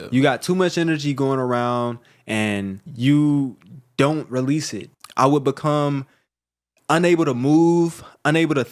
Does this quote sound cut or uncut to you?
cut